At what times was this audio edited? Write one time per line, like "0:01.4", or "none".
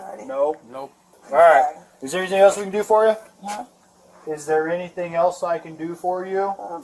0:01.2